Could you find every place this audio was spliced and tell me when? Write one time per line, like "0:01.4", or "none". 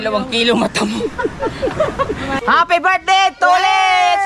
0:02.3